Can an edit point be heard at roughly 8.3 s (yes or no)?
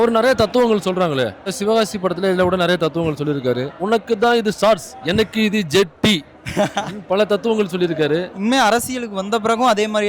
yes